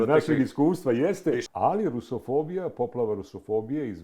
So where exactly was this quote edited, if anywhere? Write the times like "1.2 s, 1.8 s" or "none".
1.5 s